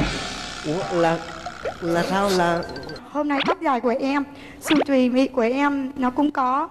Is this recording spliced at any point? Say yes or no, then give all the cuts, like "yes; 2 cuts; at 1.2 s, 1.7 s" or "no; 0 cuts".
yes; 1 cut; at 3.0 s